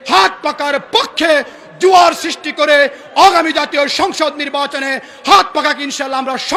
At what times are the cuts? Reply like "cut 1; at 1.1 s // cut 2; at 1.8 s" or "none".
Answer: none